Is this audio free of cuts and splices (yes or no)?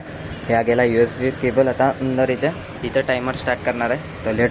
no